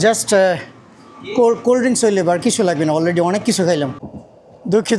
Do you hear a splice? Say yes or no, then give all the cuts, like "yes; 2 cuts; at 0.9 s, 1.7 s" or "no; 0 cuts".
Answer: yes; 1 cut; at 4.1 s